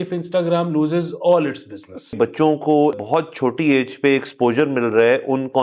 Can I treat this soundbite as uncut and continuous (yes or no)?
no